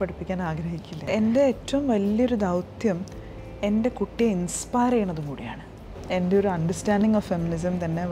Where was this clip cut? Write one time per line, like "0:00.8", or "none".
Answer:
0:01.1
0:06.0

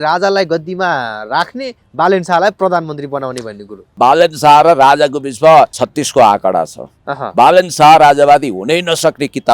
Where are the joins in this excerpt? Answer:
0:04.0
0:05.8

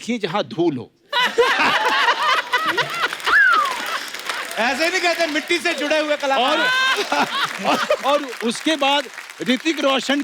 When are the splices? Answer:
none

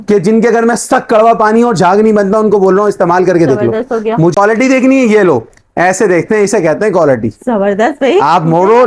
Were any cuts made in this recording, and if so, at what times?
0:04.3

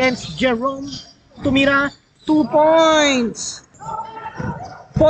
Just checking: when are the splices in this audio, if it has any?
0:03.7

